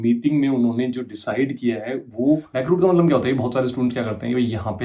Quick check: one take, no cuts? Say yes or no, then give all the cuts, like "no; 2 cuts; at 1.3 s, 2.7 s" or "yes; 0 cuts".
no; 1 cut; at 2.5 s